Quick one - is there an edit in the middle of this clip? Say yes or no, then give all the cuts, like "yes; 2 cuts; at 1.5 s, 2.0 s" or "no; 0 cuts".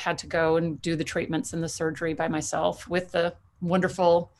no; 0 cuts